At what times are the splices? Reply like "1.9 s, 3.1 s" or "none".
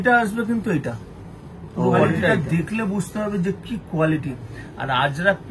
2.3 s